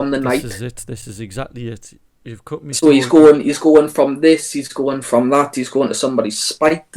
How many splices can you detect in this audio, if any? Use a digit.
0